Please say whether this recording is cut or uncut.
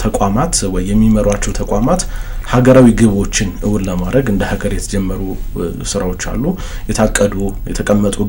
uncut